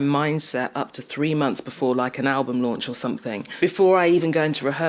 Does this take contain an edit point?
yes; 1 cut; at 3.5 s

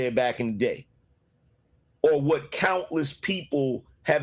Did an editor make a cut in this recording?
no; 0 cuts

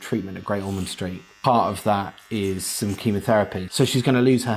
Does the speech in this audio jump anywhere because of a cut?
yes; 2 cuts; at 1.3 s, 3.6 s

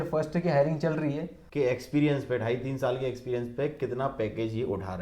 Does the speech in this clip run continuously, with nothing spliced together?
no; 1 cut; at 1.3 s

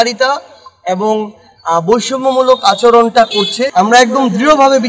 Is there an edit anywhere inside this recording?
yes; 1 cut; at 3.6 s

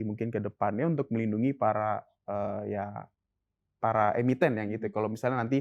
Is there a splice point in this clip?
no; 0 cuts

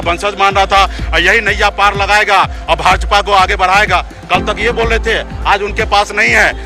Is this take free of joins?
no; 1 cut; at 1.0 s

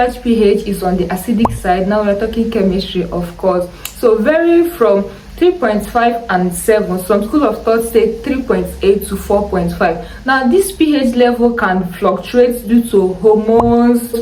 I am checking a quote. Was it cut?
no; 0 cuts

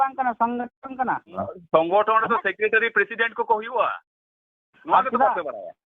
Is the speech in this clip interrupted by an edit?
yes; 1 cut; at 1.5 s

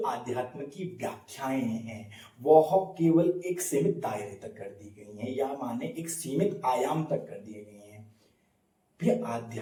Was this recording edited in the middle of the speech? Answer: no; 0 cuts

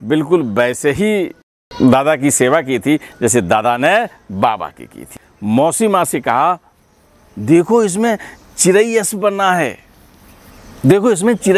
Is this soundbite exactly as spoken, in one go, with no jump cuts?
no; 1 cut; at 5.1 s

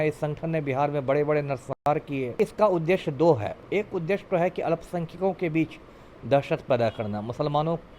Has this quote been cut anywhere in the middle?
yes; 2 cuts; at 2.3 s, 3.6 s

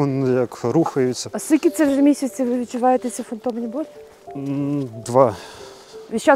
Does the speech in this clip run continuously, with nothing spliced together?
yes; 0 cuts

